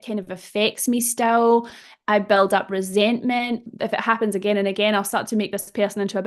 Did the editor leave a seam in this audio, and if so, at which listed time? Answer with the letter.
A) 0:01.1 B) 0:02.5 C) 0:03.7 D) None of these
C